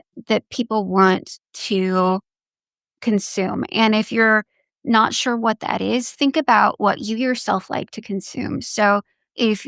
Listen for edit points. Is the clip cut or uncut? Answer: uncut